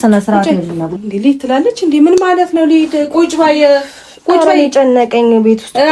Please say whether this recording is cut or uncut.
cut